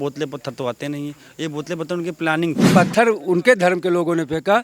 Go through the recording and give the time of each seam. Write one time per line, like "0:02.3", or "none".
0:02.7